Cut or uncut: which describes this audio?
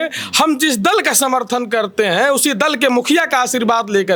uncut